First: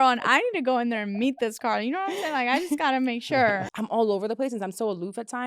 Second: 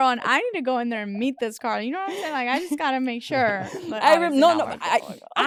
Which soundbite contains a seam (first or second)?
first